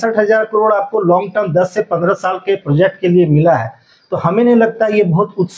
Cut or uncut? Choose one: uncut